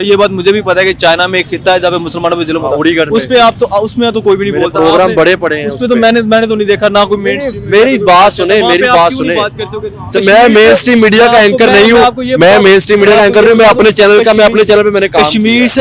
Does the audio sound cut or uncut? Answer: uncut